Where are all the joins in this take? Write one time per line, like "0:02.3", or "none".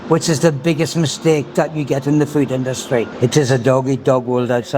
0:03.1